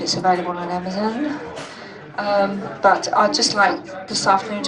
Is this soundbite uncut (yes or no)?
no